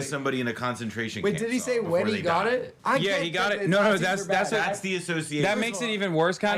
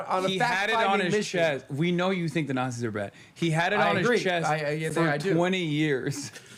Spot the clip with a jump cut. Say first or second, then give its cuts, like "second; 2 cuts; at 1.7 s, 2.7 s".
first; 1 cut; at 2.7 s